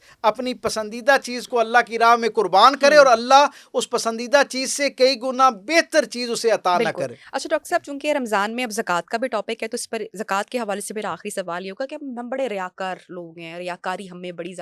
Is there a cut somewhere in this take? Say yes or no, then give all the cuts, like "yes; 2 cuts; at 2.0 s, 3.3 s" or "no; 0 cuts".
no; 0 cuts